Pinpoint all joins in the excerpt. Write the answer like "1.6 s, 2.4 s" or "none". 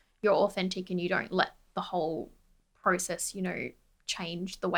none